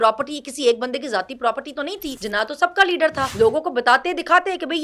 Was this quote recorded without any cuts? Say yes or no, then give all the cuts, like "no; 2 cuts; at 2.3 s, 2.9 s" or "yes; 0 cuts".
no; 2 cuts; at 2.1 s, 3.3 s